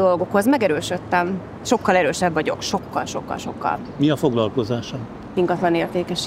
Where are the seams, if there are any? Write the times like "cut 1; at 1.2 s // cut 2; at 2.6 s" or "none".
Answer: none